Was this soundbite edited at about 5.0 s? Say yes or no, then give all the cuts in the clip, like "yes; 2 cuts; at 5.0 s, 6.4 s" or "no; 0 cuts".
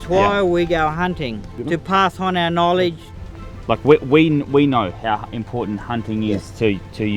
no; 2 cuts; at 1.5 s, 3.4 s